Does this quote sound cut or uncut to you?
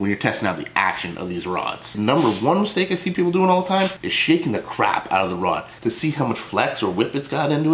uncut